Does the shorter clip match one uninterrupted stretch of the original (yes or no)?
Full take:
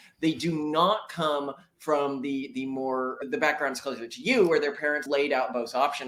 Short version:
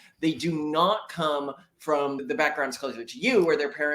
no